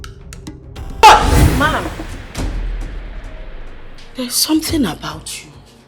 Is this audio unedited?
no; 1 cut; at 1.0 s

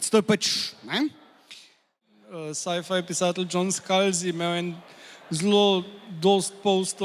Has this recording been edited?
yes; 1 cut; at 2.1 s

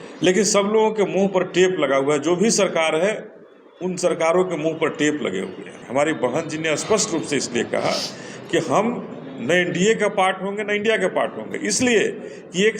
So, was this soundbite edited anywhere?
yes; 1 cut; at 5.7 s

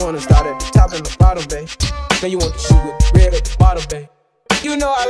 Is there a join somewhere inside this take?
no; 0 cuts

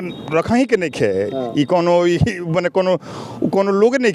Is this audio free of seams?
yes; 0 cuts

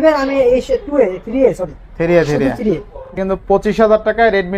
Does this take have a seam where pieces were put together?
yes; 1 cut; at 3.1 s

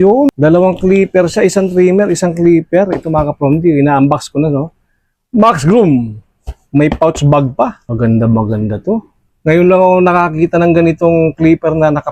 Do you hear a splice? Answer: no; 0 cuts

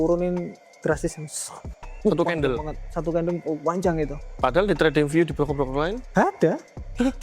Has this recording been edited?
yes; 1 cut; at 6.0 s

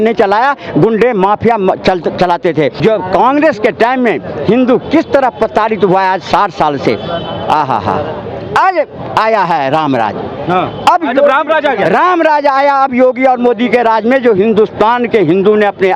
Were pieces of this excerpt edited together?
yes; 1 cut; at 2.8 s

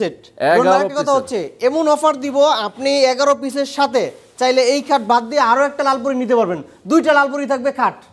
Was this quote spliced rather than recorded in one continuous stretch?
no; 0 cuts

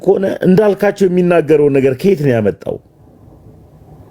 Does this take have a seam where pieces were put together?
no; 0 cuts

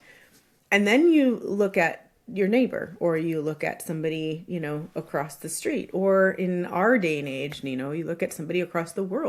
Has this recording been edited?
no; 0 cuts

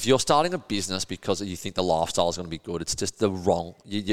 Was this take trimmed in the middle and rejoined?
no; 0 cuts

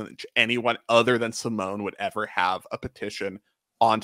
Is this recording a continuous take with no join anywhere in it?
yes; 0 cuts

